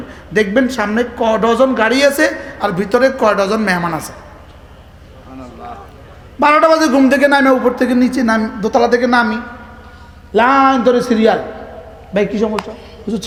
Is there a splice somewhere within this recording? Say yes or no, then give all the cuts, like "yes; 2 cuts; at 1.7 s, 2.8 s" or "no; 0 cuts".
no; 0 cuts